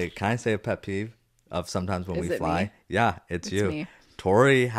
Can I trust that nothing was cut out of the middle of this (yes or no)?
yes